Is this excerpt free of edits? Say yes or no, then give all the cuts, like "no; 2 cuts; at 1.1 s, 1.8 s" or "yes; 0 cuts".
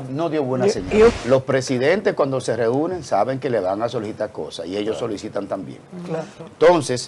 no; 1 cut; at 1.1 s